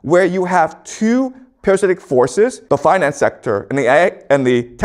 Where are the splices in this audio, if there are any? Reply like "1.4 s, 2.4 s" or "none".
2.6 s